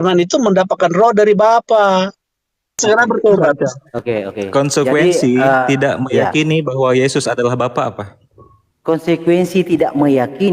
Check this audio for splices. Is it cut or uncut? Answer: cut